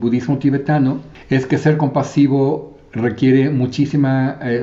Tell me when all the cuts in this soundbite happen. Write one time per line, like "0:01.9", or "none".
0:01.1